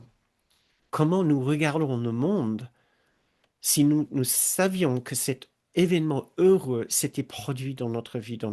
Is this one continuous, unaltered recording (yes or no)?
no